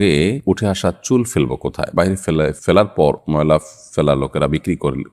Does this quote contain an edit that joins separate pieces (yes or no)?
no